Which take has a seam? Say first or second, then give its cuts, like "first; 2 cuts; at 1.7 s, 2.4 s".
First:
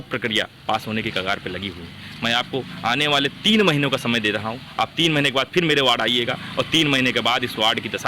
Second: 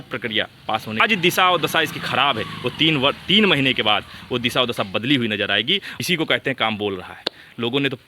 second; 2 cuts; at 1.0 s, 5.9 s